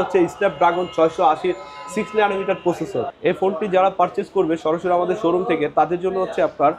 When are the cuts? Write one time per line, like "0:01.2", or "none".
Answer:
0:03.1